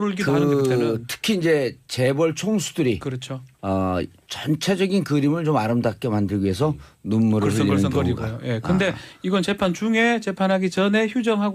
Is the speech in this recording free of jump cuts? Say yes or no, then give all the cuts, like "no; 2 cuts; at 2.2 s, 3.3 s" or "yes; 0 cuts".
no; 1 cut; at 3.7 s